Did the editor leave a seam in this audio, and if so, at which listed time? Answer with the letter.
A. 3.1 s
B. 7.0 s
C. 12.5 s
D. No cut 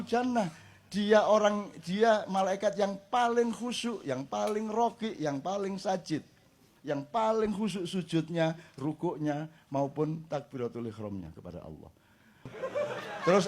C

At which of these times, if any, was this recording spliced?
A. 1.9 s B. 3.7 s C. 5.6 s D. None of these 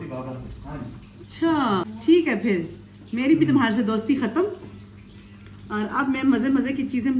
A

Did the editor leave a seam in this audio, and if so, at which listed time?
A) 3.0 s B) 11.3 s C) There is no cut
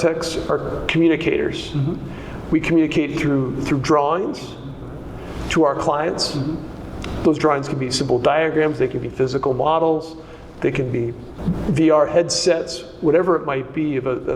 B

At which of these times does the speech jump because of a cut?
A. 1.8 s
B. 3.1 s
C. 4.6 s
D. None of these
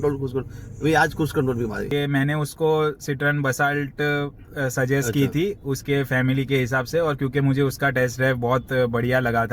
A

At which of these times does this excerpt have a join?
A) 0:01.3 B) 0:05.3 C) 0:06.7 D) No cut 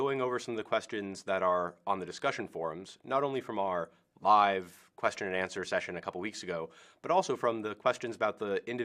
B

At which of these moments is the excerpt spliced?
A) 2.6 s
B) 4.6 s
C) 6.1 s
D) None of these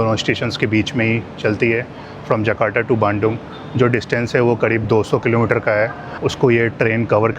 C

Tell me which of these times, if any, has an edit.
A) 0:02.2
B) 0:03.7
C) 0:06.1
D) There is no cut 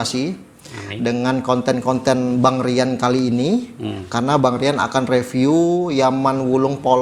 D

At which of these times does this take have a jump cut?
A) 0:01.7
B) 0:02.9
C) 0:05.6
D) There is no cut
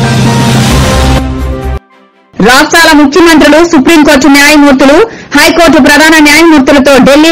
A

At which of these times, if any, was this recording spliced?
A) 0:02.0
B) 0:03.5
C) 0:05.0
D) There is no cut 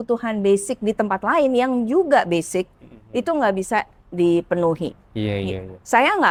D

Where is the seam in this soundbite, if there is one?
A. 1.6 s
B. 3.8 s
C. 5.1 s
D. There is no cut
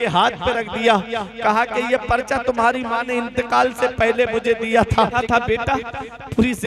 C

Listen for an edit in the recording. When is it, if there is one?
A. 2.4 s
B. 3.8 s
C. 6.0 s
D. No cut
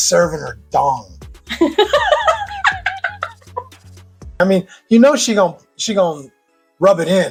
D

